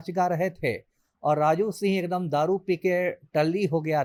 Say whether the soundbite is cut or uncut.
uncut